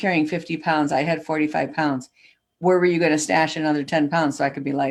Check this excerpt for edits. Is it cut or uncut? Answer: uncut